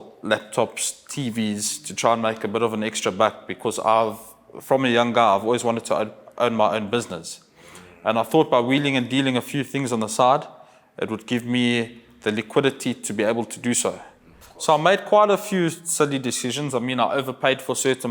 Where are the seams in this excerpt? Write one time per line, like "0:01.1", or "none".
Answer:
0:14.6